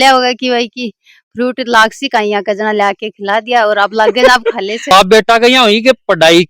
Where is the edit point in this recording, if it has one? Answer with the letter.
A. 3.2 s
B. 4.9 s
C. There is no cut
B